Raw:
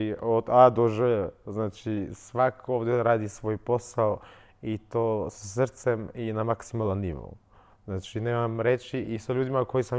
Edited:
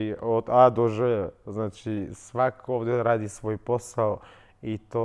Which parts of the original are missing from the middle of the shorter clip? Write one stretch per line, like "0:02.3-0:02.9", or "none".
none